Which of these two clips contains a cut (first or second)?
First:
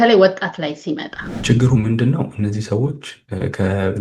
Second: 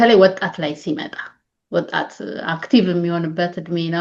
first